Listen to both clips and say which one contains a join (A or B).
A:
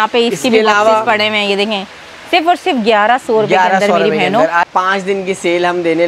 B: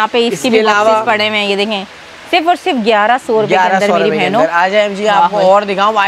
A